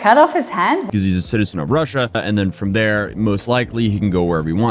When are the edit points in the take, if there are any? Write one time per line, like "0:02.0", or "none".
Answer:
0:00.9
0:02.2